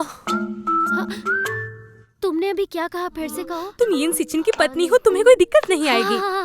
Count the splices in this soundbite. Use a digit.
1